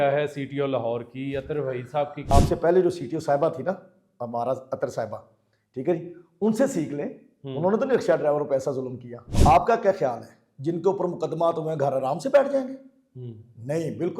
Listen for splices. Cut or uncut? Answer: cut